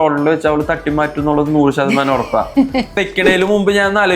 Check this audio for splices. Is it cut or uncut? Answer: cut